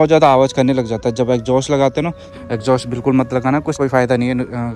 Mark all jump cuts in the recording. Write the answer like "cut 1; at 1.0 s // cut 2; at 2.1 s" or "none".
cut 1; at 2.3 s // cut 2; at 3.8 s